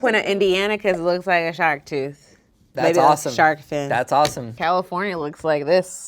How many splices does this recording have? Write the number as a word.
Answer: one